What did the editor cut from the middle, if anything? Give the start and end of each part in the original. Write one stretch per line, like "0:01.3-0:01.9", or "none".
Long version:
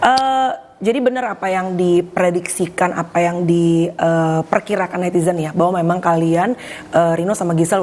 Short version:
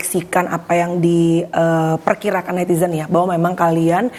none